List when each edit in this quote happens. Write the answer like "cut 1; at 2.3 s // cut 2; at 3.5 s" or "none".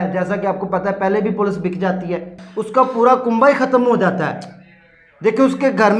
cut 1; at 2.4 s